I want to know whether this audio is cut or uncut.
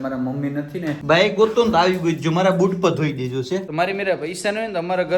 cut